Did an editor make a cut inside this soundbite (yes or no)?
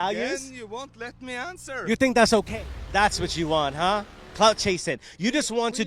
yes